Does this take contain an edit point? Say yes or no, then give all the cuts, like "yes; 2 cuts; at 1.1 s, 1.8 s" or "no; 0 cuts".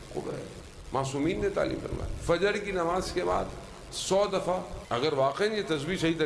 yes; 1 cut; at 4.8 s